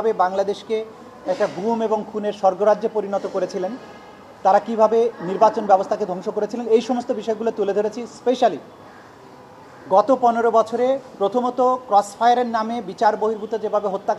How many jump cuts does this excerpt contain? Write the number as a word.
zero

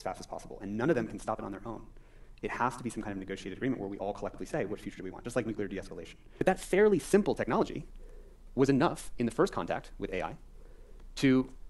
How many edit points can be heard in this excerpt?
one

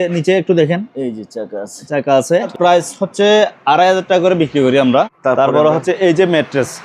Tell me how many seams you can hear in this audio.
two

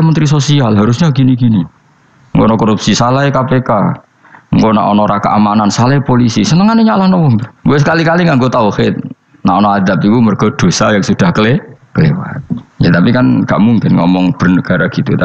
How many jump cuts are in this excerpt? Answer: zero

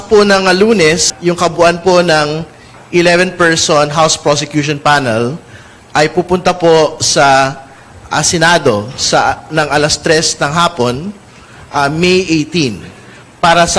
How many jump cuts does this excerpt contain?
one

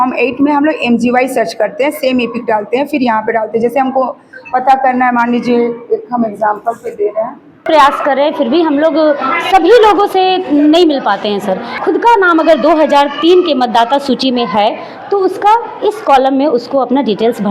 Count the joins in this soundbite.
two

